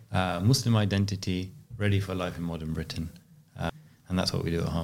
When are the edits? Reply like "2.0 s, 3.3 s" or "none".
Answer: 3.7 s